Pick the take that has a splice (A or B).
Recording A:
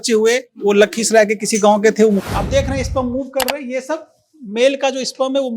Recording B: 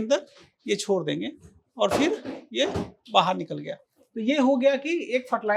A